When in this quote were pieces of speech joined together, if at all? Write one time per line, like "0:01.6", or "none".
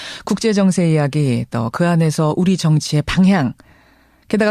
none